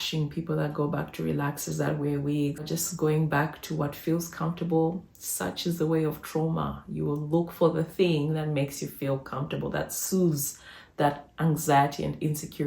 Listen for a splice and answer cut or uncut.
cut